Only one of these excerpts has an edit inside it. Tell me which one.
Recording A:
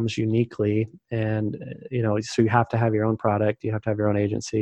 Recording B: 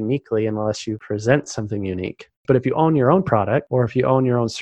B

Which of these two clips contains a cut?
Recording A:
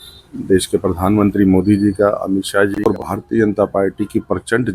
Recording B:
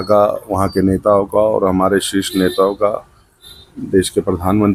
A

